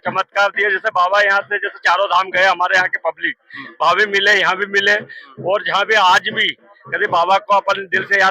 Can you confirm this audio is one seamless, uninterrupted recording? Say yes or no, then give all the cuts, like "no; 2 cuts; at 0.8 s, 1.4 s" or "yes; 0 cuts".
yes; 0 cuts